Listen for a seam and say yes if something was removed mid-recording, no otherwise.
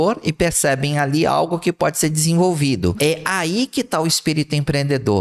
yes